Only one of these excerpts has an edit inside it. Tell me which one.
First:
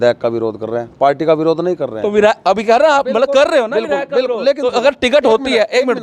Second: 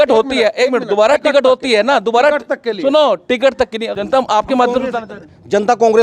second; 1 cut; at 3.8 s

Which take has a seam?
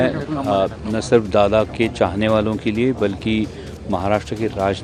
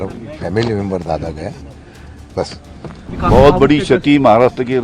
second; 1 cut; at 3.1 s

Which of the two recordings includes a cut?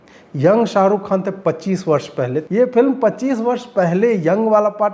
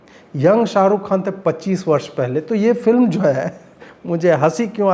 first; 1 cut; at 2.4 s

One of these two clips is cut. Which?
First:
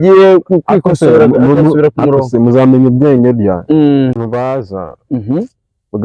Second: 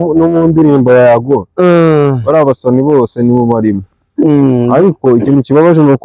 first; 1 cut; at 4.2 s

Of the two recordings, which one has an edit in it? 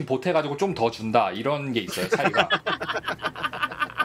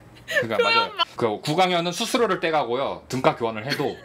second; 1 cut; at 1.1 s

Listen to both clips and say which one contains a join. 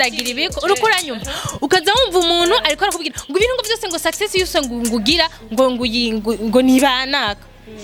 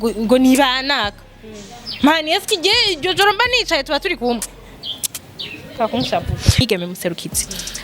second; 1 cut; at 6.6 s

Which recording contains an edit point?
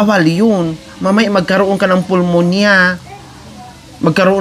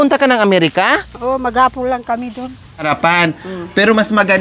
second; 1 cut; at 2.9 s

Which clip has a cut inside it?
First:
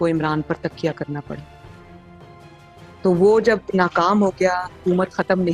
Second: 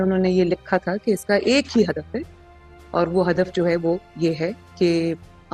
first; 2 cuts; at 1.5 s, 2.9 s

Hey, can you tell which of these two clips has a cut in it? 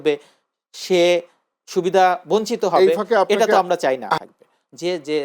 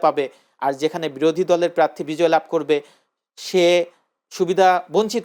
first; 1 cut; at 4.2 s

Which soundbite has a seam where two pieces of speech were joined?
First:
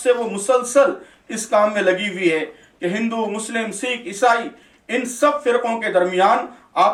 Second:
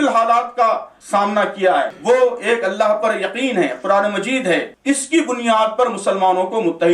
second; 3 cuts; at 0.9 s, 1.9 s, 4.7 s

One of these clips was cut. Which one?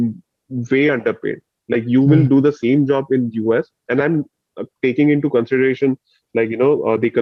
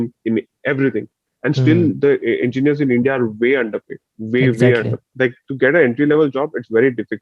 second; 1 cut; at 5.0 s

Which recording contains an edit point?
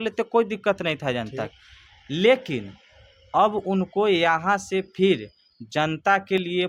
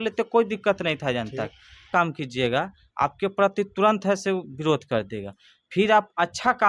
second; 1 cut; at 1.9 s

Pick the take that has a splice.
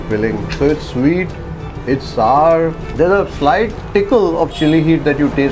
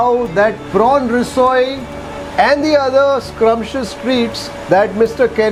first; 2 cuts; at 2.8 s, 3.8 s

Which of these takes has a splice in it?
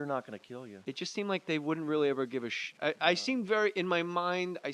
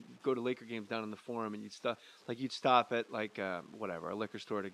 first; 1 cut; at 3.0 s

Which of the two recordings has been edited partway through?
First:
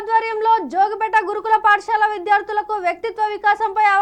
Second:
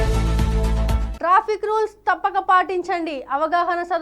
second; 1 cut; at 1.1 s

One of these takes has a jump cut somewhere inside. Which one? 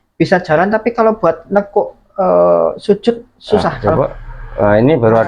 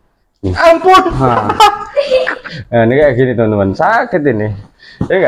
first; 1 cut; at 4.0 s

